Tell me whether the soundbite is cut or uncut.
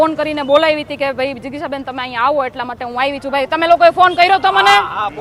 uncut